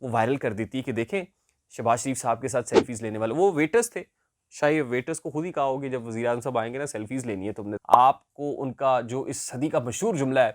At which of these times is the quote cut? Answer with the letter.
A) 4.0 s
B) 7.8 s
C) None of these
B